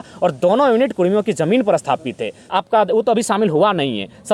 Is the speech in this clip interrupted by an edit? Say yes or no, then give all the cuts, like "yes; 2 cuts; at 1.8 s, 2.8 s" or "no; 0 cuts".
yes; 1 cut; at 2.5 s